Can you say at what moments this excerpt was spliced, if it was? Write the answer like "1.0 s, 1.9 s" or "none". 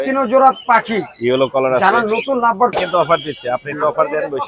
2.8 s